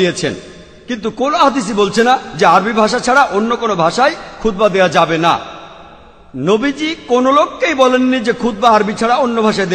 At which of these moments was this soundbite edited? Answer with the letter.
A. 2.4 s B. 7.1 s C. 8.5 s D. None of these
C